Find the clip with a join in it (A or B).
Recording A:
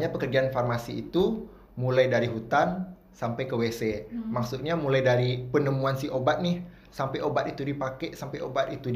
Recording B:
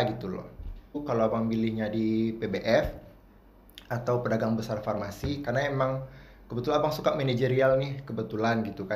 B